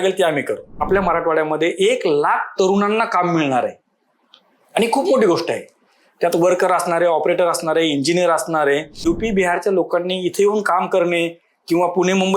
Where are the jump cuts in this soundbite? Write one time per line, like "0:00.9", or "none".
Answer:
0:00.8
0:09.0